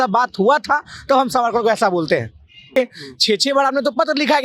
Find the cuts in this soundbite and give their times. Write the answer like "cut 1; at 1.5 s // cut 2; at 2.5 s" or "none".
cut 1; at 2.8 s